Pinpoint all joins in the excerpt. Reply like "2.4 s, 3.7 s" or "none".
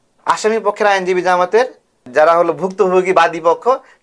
2.0 s